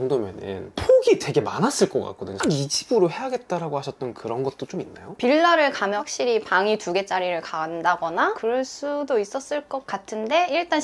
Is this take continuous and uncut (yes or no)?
no